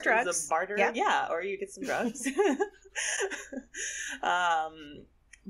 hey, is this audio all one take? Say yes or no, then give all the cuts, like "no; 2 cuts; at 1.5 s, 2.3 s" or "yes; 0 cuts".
yes; 0 cuts